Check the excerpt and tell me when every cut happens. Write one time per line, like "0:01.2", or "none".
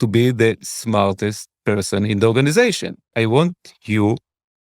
0:03.1